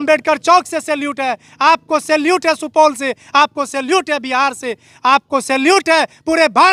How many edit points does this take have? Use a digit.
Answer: 0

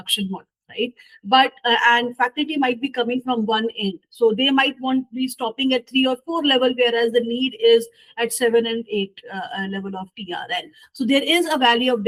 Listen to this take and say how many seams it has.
0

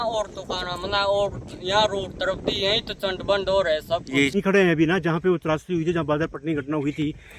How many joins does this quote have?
1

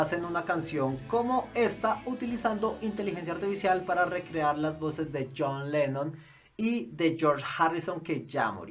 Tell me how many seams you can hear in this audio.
0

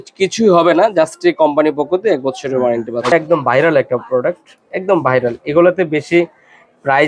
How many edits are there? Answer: 1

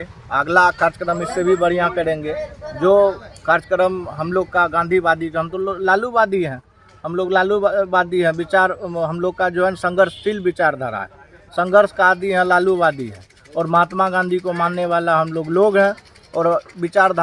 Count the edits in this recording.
0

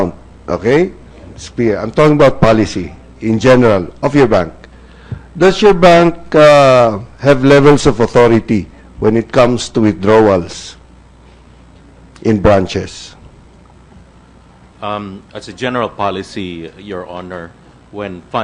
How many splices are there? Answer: 0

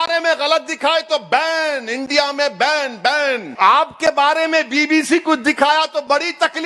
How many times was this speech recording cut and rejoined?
1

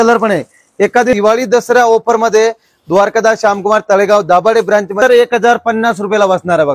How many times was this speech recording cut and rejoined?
2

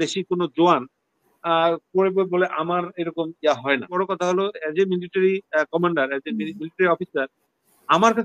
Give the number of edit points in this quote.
1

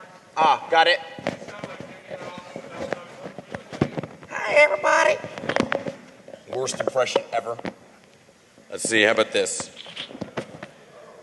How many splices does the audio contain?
0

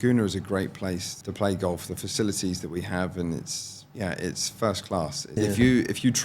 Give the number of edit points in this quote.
2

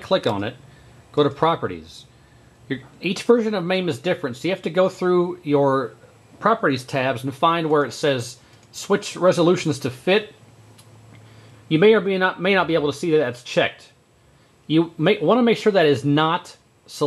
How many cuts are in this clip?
1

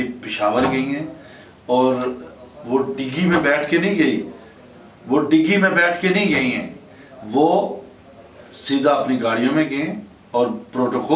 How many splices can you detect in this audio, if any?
0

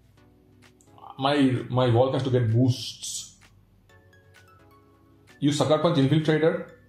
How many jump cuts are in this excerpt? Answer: 0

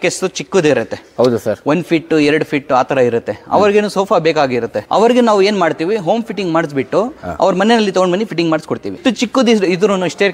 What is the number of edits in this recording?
0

